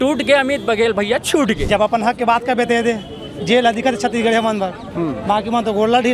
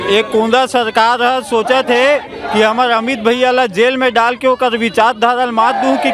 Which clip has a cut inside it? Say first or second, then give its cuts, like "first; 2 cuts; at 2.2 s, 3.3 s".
first; 1 cut; at 1.6 s